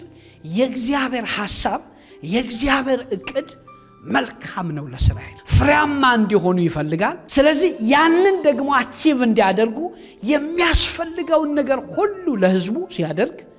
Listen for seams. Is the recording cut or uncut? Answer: uncut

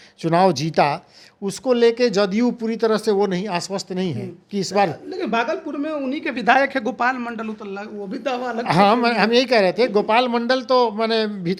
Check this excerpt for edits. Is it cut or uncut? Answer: uncut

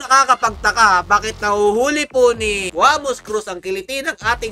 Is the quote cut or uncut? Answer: uncut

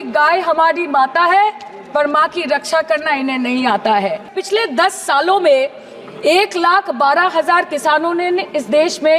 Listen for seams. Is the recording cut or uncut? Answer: cut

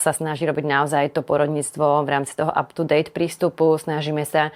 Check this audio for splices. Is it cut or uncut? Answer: uncut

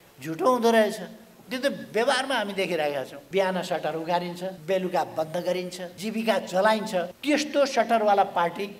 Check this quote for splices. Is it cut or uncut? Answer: cut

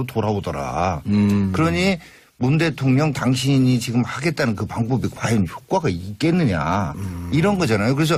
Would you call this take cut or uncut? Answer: uncut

